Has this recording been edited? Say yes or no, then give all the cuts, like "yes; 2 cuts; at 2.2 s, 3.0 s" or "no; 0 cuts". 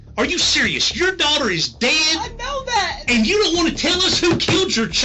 no; 0 cuts